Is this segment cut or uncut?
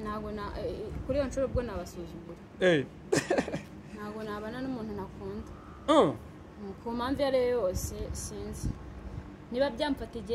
uncut